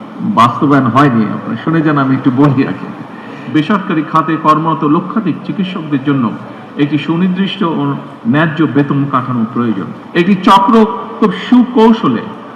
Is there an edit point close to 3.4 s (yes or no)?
yes